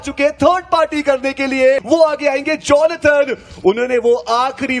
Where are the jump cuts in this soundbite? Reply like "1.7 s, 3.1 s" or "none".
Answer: 1.8 s